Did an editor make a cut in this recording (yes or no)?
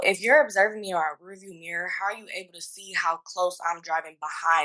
no